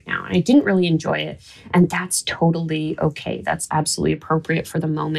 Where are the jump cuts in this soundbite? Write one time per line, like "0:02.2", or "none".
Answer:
none